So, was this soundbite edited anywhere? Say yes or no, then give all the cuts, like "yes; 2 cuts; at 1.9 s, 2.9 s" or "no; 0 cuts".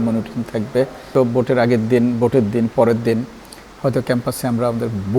yes; 1 cut; at 1.1 s